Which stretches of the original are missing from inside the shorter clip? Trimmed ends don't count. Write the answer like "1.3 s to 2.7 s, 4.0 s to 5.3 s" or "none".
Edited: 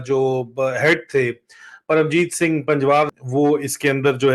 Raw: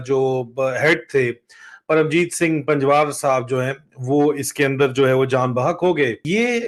3.1 s to 3.9 s